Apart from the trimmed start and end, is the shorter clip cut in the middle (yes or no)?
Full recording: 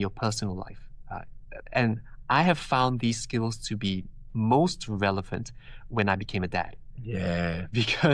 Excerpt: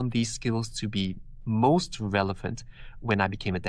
no